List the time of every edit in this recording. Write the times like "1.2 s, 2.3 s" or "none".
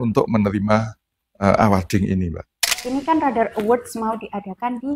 2.8 s